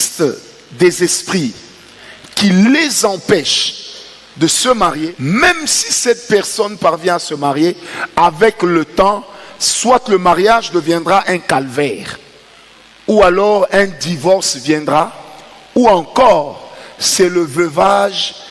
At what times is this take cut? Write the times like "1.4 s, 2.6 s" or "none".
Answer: 5.1 s